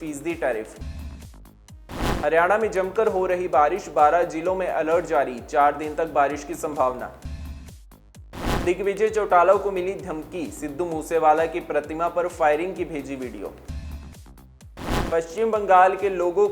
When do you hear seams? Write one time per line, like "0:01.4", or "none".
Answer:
0:13.8
0:15.0